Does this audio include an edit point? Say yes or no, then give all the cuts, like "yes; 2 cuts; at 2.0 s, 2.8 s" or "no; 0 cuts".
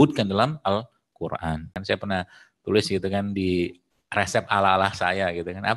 yes; 1 cut; at 1.8 s